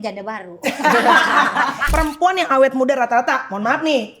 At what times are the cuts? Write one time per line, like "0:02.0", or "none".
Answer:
0:01.8